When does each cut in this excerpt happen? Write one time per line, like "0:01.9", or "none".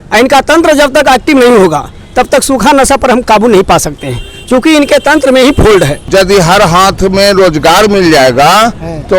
0:06.1